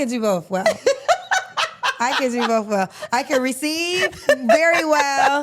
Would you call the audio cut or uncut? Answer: uncut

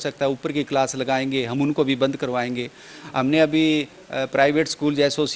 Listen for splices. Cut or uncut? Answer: uncut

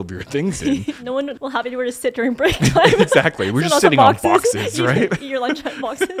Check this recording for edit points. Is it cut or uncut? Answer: cut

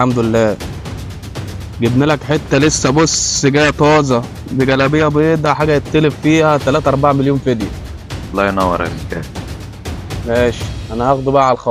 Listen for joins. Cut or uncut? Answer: uncut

